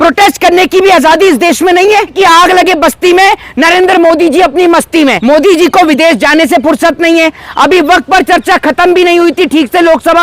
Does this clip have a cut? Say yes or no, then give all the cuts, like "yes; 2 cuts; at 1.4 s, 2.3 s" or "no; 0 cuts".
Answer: yes; 2 cuts; at 2.1 s, 5.2 s